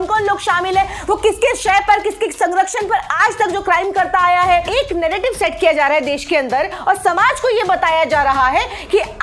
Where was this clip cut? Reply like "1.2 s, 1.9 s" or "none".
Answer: 4.7 s